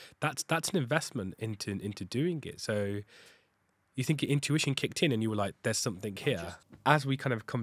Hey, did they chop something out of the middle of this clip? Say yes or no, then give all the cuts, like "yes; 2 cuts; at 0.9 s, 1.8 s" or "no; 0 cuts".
yes; 1 cut; at 6.2 s